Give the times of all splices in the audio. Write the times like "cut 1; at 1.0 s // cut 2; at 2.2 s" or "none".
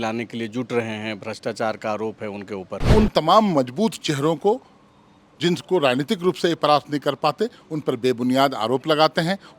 cut 1; at 2.9 s